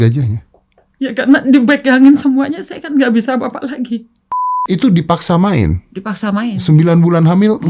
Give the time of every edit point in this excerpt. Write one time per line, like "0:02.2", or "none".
0:04.6